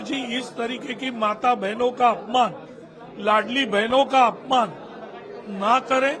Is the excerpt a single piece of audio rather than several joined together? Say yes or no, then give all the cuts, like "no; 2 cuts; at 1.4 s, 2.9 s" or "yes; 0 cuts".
yes; 0 cuts